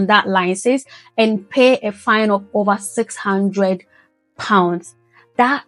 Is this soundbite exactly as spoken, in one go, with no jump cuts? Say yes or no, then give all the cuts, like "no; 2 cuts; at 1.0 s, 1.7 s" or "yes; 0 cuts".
yes; 0 cuts